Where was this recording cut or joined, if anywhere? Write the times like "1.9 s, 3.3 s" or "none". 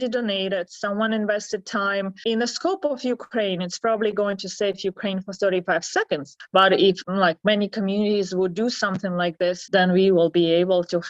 2.2 s, 7.0 s, 9.6 s